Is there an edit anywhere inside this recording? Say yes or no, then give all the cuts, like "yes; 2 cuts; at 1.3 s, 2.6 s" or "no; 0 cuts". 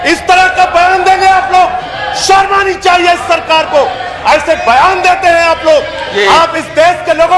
no; 0 cuts